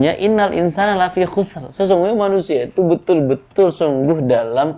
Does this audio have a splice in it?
no; 0 cuts

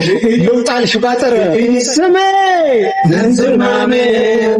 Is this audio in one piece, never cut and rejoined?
yes; 0 cuts

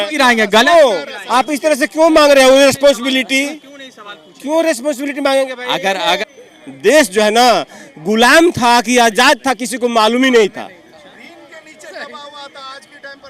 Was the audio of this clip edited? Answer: yes; 1 cut; at 6.3 s

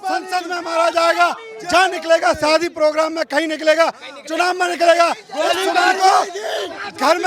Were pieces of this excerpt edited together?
no; 0 cuts

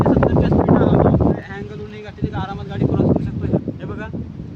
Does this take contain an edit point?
yes; 2 cuts; at 1.4 s, 3.4 s

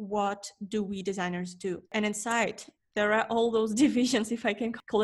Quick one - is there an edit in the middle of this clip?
yes; 1 cut; at 1.9 s

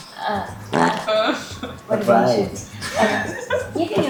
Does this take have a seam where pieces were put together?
no; 0 cuts

